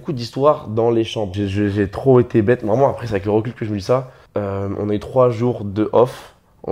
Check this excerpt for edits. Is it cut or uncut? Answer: cut